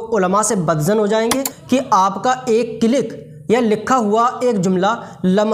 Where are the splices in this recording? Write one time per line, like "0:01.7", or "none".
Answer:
0:01.5